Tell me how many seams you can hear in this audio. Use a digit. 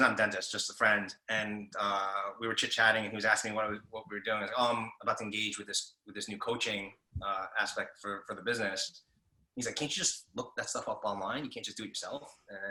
0